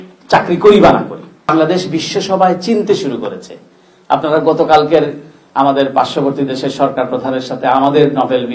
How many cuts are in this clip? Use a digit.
1